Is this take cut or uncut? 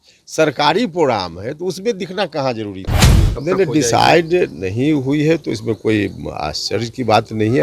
cut